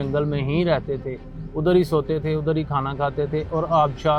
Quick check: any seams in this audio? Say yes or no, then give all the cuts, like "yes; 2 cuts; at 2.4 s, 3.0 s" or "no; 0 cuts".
no; 0 cuts